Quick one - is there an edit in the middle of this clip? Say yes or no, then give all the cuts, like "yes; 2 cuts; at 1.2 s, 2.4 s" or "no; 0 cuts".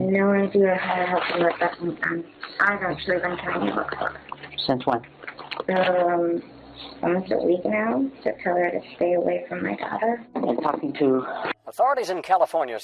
yes; 1 cut; at 11.5 s